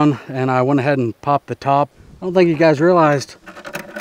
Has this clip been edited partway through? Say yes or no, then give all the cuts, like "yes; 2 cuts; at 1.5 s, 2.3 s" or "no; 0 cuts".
yes; 1 cut; at 2.0 s